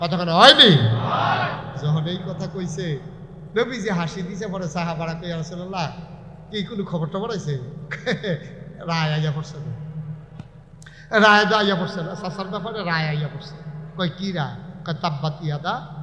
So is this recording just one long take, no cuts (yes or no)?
yes